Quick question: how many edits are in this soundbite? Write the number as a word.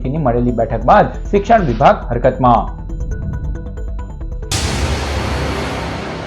one